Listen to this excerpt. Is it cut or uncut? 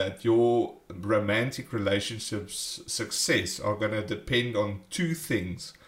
uncut